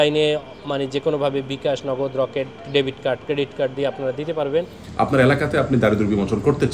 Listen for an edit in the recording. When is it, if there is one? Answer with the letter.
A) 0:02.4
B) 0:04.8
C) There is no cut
B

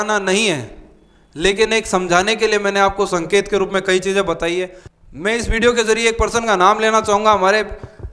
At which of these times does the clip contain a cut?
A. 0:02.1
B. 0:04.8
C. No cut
B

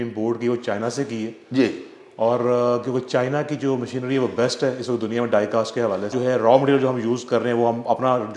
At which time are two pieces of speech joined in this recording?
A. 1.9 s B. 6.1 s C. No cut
B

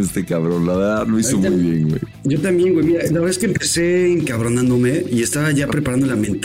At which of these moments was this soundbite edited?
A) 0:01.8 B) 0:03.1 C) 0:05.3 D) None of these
A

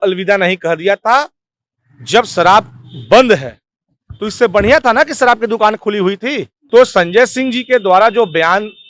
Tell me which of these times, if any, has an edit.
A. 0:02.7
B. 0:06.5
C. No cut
B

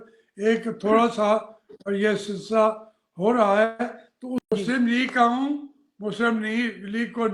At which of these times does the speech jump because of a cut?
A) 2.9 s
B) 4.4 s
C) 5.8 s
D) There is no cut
B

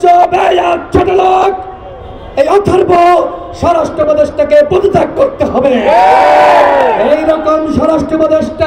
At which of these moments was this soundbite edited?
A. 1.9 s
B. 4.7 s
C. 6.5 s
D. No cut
D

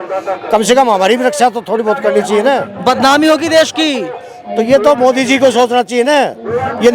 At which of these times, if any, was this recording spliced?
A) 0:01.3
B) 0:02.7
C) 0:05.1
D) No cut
B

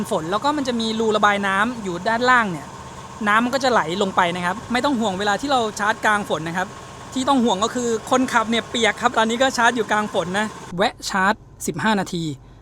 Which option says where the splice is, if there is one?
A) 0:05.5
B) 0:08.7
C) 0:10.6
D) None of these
C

